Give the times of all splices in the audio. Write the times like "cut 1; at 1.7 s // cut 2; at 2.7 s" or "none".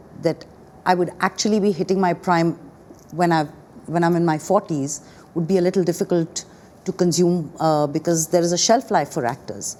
none